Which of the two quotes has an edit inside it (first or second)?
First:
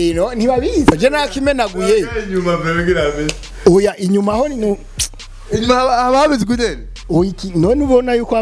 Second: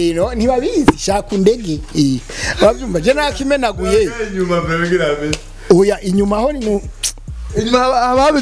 first